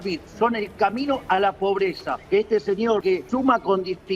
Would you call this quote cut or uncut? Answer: cut